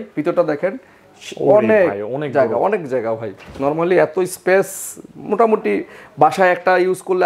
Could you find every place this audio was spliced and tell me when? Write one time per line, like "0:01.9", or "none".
none